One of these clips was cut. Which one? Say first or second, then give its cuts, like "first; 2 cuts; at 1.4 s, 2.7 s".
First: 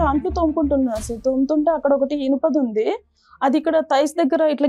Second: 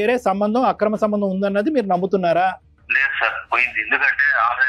second; 1 cut; at 2.7 s